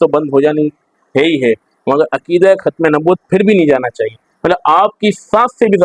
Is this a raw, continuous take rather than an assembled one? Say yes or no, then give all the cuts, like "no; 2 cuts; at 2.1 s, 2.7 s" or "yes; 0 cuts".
yes; 0 cuts